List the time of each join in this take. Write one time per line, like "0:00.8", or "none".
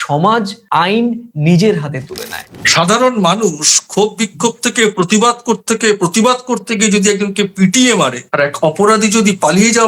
0:02.5

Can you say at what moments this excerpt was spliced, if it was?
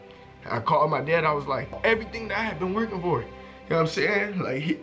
0:01.8

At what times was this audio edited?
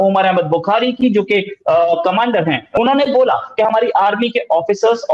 0:02.7

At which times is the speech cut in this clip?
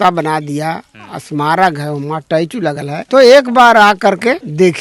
none

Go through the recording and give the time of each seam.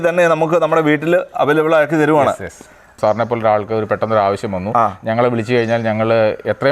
0:02.9

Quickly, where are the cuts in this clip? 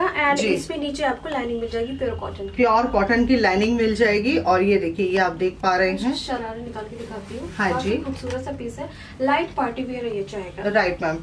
none

